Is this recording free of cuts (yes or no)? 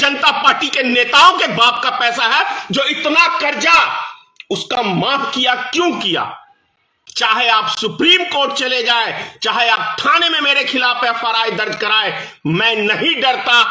no